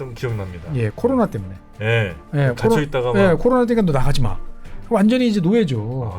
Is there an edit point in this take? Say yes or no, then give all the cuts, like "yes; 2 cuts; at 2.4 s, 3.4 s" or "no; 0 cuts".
no; 0 cuts